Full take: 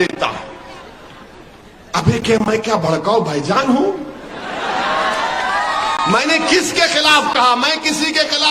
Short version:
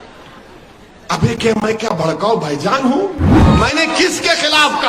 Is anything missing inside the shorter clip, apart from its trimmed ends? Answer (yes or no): yes